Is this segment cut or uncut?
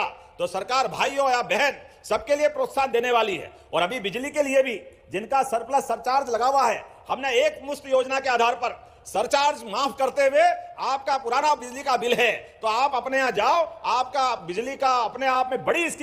uncut